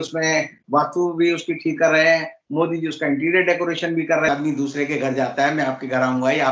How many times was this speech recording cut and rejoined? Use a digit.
1